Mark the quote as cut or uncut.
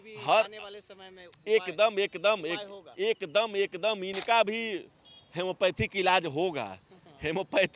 uncut